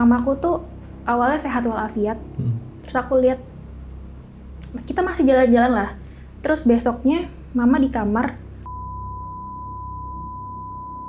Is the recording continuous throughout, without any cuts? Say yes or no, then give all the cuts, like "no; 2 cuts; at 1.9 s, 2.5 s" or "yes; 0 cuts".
yes; 0 cuts